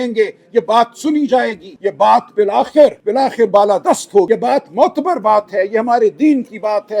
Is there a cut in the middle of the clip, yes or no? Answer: yes